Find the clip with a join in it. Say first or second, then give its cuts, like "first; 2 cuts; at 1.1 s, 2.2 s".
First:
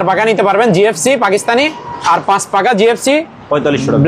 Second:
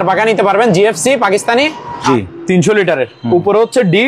second; 1 cut; at 2.0 s